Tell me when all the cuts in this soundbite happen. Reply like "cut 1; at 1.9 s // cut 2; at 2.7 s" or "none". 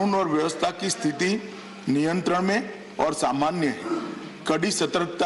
cut 1; at 2.3 s